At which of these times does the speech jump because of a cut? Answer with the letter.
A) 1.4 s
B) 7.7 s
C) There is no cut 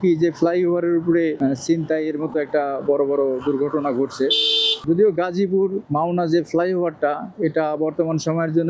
A